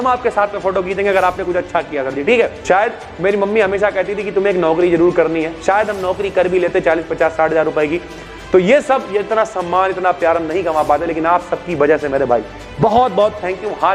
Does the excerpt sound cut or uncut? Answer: cut